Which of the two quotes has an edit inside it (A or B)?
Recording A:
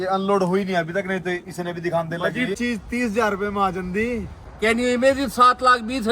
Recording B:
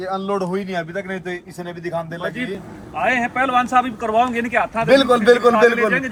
A